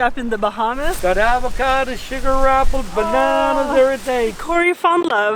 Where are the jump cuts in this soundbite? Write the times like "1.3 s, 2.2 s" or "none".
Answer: 0.9 s, 4.4 s